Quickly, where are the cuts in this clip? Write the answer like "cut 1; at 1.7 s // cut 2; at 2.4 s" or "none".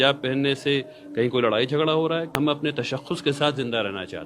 cut 1; at 2.3 s